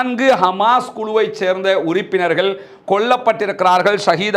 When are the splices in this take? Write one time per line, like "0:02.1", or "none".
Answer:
none

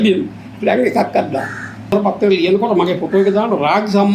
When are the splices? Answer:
0:01.9

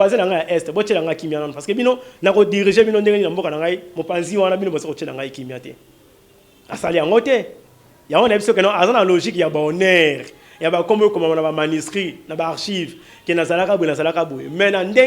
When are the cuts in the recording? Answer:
none

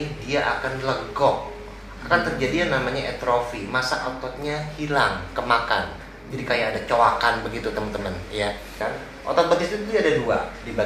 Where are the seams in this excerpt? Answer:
0:08.8

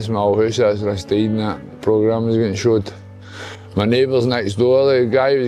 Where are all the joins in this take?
none

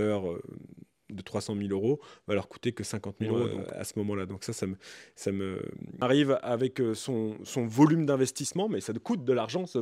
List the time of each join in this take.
0:03.6
0:05.9

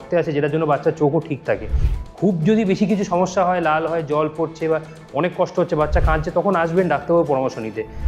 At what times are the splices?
none

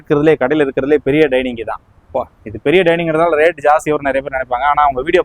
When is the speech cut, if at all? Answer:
none

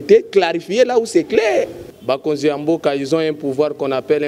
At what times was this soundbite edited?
0:01.8

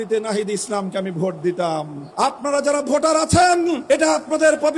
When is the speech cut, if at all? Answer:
0:02.0
0:03.8

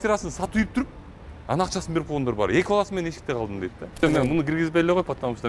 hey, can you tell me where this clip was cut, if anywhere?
0:04.0

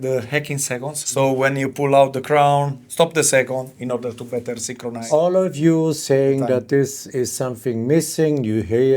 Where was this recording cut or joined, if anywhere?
0:01.0

